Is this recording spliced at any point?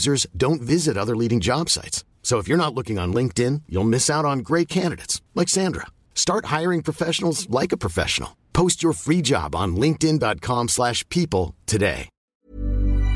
yes; 1 cut; at 12.1 s

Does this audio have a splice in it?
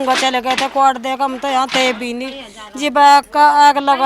no; 0 cuts

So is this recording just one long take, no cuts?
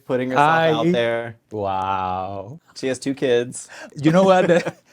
no; 3 cuts; at 1.4 s, 2.5 s, 3.9 s

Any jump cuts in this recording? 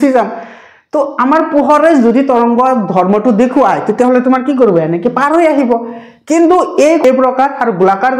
yes; 1 cut; at 7.0 s

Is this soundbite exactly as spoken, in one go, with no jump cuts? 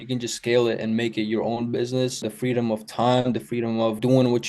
yes; 0 cuts

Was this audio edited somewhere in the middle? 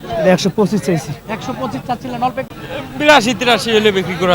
yes; 1 cut; at 2.5 s

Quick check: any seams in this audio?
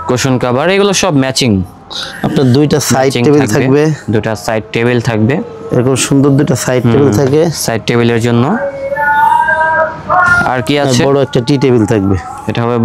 no; 0 cuts

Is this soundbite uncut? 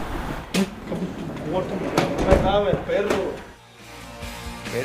yes; 0 cuts

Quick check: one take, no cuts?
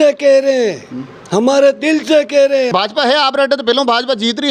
no; 1 cut; at 2.7 s

